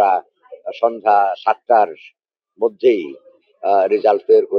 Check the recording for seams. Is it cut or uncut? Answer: uncut